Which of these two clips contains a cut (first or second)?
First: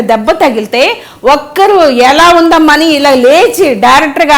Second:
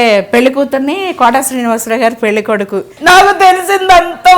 second